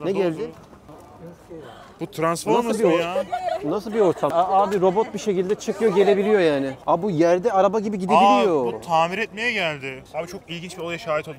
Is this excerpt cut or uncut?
cut